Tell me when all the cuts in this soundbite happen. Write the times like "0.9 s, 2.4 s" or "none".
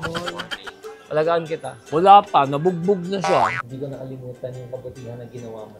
3.6 s